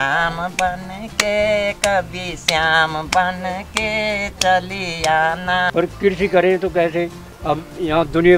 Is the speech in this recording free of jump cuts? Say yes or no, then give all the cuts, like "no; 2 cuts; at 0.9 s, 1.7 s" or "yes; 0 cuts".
no; 2 cuts; at 5.7 s, 7.3 s